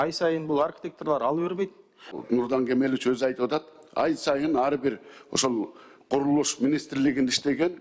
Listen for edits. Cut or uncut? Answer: cut